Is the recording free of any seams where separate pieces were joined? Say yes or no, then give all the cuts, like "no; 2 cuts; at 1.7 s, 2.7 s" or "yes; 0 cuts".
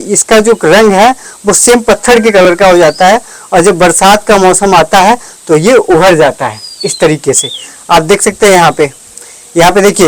yes; 0 cuts